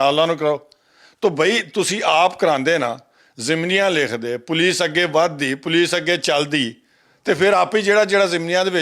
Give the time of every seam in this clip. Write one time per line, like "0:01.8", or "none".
none

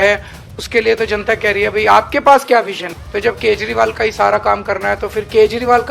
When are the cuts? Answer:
0:02.9

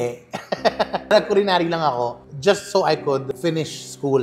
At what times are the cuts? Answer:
0:01.1

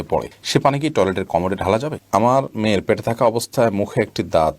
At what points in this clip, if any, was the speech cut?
0:02.0

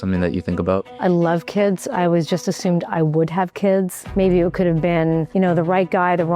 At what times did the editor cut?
0:00.9
0:04.0
0:05.3

